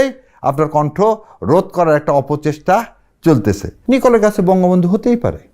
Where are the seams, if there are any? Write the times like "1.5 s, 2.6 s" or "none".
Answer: 3.7 s